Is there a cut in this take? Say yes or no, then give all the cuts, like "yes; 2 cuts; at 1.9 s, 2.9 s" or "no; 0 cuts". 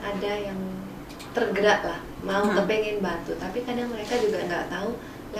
no; 0 cuts